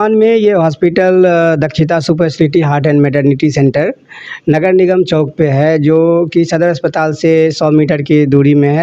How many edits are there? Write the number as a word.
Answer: zero